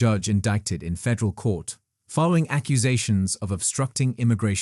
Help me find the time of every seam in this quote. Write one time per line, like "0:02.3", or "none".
none